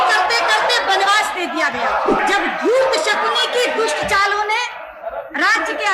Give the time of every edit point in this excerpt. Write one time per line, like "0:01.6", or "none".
0:02.2